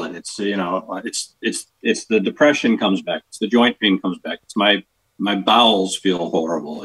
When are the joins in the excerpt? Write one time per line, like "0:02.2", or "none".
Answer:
none